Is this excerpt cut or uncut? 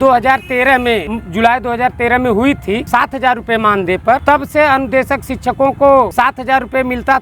cut